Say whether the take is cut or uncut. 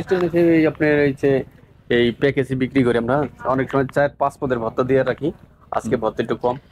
uncut